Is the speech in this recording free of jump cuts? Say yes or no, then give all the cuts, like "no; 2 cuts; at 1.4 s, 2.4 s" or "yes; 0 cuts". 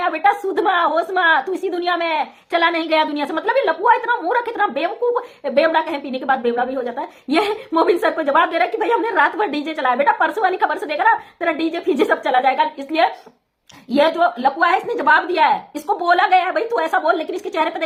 yes; 0 cuts